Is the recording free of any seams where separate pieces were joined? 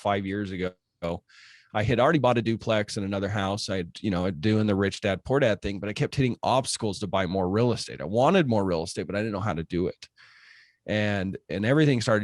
yes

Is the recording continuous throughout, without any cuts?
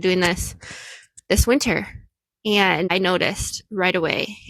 no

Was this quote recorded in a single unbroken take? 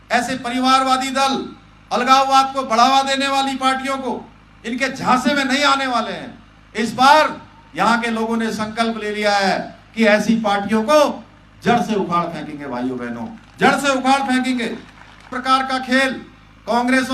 no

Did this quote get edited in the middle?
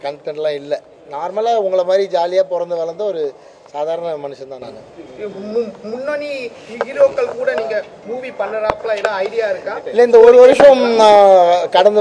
no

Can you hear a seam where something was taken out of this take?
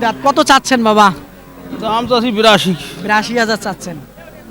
no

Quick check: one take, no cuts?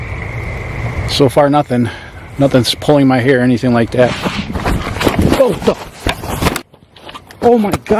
yes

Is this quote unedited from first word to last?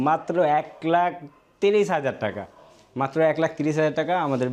yes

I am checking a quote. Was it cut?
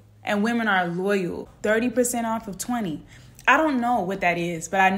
yes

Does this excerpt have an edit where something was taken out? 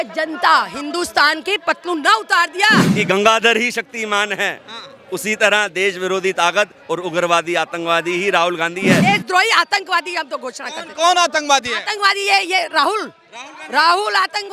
yes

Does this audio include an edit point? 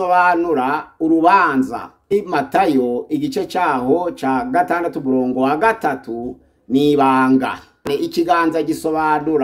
yes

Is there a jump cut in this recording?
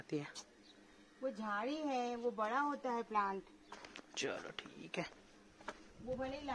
no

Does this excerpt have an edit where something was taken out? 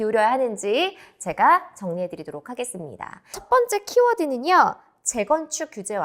yes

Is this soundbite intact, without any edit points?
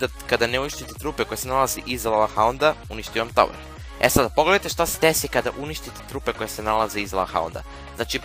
no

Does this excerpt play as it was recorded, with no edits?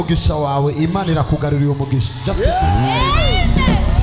yes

